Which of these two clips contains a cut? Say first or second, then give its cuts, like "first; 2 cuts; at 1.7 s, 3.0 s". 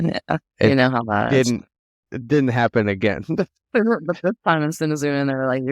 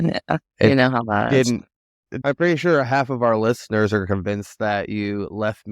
second; 1 cut; at 2.1 s